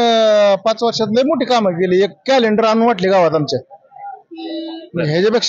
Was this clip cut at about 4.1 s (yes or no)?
no